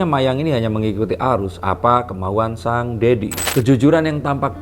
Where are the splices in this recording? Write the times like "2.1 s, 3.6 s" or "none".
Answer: 3.4 s